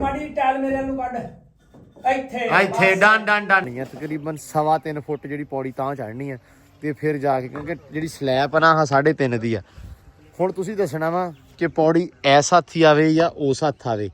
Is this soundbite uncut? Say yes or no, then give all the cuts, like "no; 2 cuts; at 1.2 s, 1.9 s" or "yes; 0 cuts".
no; 1 cut; at 3.8 s